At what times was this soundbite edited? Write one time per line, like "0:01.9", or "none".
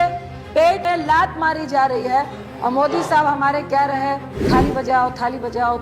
0:00.8
0:02.4
0:04.3